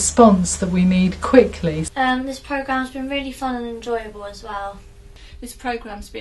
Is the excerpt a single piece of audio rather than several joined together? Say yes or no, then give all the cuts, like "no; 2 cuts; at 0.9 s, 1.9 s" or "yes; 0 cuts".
no; 2 cuts; at 1.8 s, 4.9 s